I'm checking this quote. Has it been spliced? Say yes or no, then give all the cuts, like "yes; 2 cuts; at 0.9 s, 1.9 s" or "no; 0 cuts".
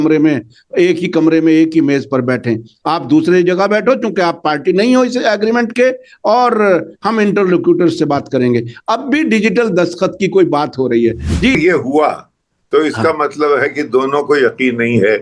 yes; 1 cut; at 11.6 s